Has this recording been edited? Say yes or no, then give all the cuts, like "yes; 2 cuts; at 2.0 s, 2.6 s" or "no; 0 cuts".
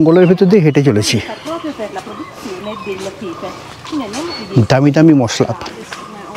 no; 0 cuts